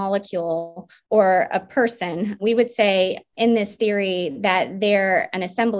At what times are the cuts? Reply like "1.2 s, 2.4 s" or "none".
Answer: 2.4 s, 3.3 s